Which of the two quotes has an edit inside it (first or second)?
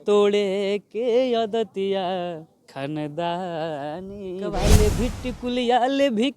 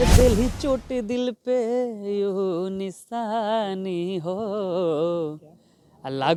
first